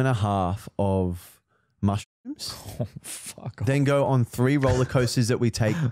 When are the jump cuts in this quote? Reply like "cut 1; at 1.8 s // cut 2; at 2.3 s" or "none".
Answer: none